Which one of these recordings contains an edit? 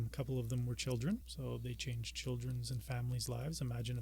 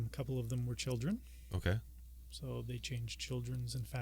first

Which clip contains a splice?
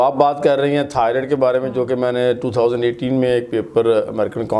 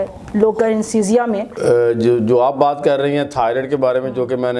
second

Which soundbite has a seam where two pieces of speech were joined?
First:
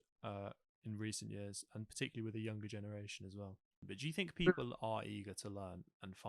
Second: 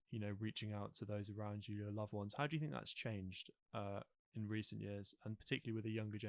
first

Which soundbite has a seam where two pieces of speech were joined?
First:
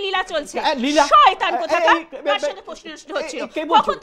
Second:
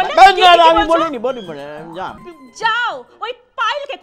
second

